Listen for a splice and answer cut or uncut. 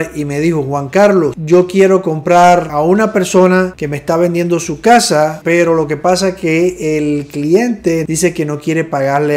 cut